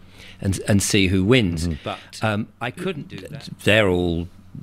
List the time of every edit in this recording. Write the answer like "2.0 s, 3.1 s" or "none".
3.0 s